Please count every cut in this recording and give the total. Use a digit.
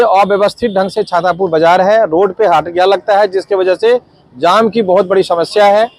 0